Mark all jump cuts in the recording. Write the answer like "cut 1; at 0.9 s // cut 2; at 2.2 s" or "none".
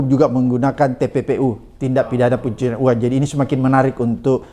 none